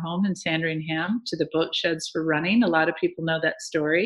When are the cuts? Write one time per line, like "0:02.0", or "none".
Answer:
none